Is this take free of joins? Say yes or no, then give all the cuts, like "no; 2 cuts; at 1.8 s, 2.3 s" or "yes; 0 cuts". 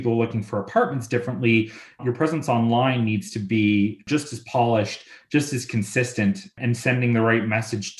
no; 3 cuts; at 2.0 s, 4.0 s, 6.6 s